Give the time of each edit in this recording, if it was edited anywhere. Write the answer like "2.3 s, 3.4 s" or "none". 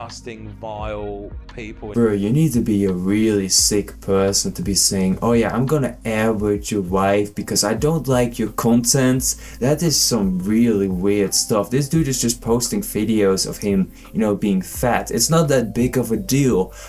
1.9 s